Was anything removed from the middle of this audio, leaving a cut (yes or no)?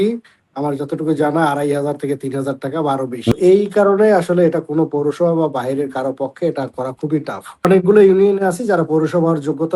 yes